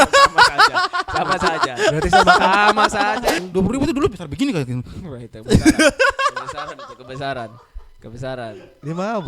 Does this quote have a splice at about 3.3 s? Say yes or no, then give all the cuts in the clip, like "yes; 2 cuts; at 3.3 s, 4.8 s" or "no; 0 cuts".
yes; 1 cut; at 3.3 s